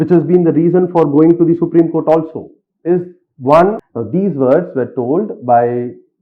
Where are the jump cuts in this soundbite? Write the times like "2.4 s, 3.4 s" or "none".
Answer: 3.9 s